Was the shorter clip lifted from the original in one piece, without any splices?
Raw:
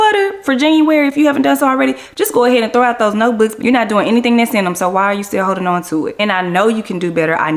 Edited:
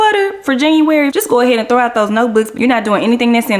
no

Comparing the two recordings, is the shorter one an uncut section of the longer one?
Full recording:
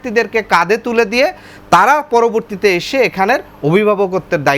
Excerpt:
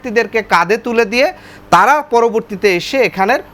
yes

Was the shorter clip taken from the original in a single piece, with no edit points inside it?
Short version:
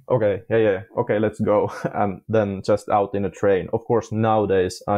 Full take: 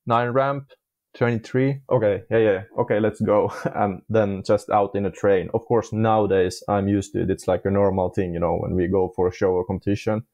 yes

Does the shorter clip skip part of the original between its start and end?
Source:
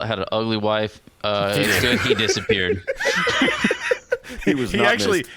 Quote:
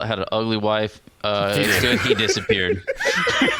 no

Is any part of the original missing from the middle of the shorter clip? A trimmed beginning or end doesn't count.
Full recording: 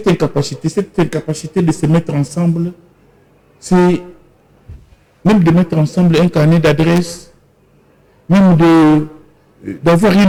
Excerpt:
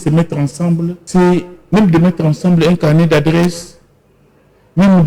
yes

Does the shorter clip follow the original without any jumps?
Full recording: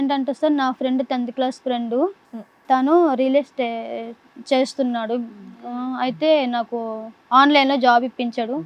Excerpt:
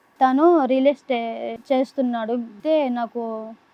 no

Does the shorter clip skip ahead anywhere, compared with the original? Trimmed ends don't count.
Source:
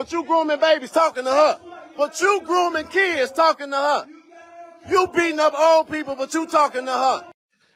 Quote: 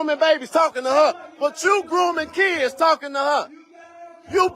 yes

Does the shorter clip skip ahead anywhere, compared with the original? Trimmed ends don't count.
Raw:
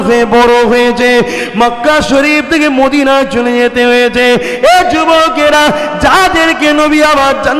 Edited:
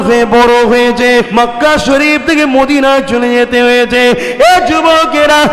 yes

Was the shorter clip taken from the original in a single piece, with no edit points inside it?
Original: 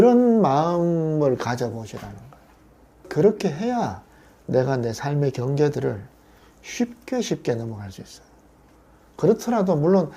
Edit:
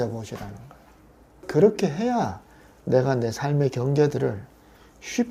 yes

